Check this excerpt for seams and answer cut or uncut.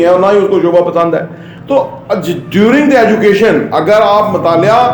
uncut